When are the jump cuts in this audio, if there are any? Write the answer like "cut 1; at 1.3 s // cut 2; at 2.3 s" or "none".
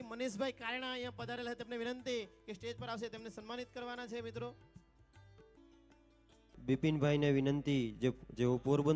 cut 1; at 6.5 s